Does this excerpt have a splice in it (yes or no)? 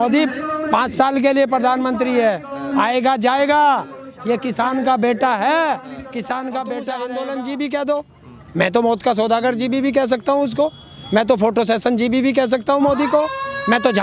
yes